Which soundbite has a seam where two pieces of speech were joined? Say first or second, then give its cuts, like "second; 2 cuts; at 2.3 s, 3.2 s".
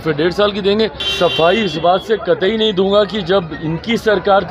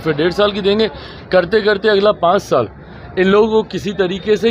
first; 1 cut; at 1.0 s